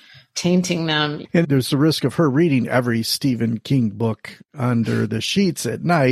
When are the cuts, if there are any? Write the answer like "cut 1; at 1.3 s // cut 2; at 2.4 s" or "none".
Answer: cut 1; at 1.2 s